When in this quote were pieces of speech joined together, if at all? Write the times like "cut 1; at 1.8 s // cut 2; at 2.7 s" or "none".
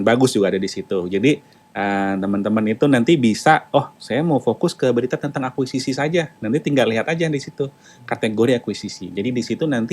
none